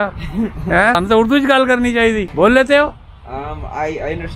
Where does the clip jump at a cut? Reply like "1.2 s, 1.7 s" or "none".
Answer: 1.0 s, 2.3 s